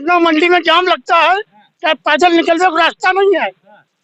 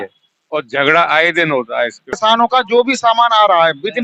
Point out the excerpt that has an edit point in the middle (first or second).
second